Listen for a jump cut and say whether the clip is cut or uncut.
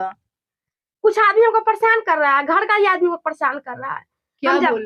uncut